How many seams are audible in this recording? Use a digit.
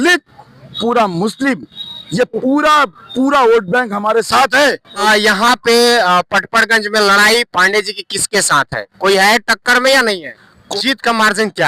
2